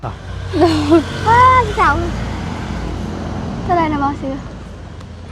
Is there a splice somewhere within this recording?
yes; 1 cut; at 1.0 s

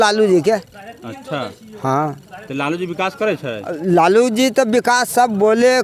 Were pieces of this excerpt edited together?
no; 0 cuts

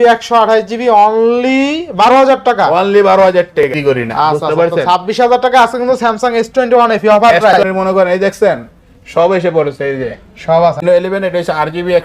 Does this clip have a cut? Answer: yes; 3 cuts; at 3.7 s, 7.5 s, 10.8 s

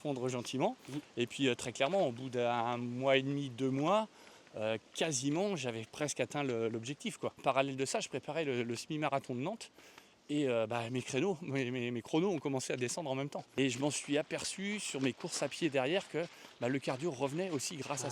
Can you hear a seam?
yes; 2 cuts; at 7.4 s, 13.4 s

